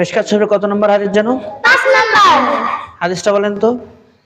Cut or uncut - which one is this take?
uncut